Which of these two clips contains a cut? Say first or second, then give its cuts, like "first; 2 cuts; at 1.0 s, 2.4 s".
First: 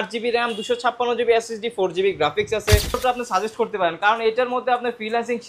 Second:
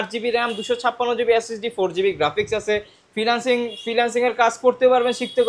first; 1 cut; at 3.0 s